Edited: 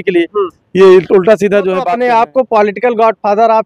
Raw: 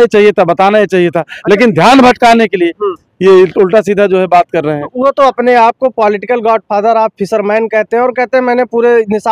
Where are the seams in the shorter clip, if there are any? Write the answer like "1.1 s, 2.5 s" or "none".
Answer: 1.9 s